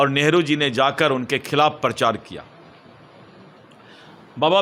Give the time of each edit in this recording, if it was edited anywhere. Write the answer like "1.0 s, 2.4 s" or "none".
none

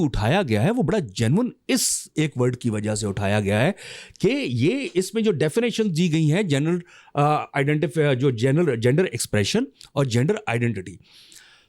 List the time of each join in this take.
none

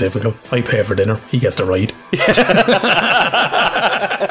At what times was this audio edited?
none

